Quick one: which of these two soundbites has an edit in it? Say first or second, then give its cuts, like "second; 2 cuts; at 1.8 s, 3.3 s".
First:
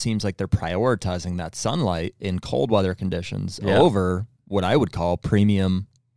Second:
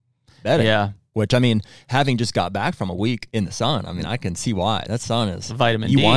second; 2 cuts; at 1.0 s, 3.2 s